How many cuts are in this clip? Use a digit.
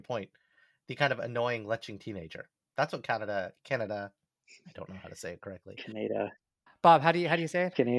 0